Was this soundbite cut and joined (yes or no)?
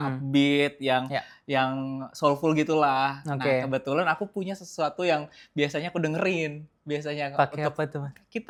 no